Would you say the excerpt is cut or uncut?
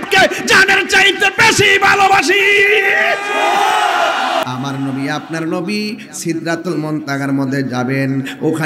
cut